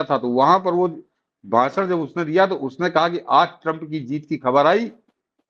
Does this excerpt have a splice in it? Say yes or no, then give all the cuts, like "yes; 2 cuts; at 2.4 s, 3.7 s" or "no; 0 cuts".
no; 0 cuts